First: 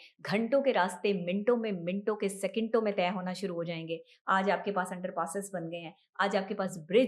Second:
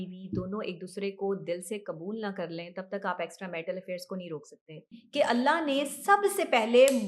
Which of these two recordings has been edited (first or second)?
second